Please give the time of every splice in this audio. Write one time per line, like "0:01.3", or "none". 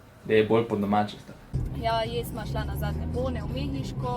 0:01.6